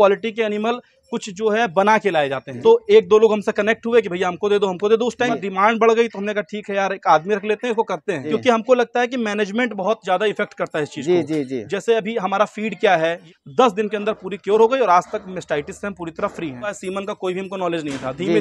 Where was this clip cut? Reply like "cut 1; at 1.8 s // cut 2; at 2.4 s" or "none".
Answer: cut 1; at 2.5 s // cut 2; at 5.5 s // cut 3; at 8.2 s // cut 4; at 13.2 s // cut 5; at 16.8 s